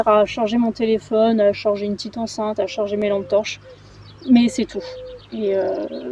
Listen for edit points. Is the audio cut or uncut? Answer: uncut